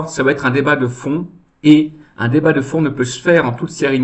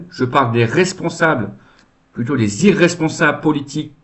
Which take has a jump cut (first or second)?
first